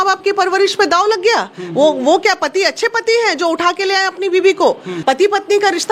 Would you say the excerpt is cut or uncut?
cut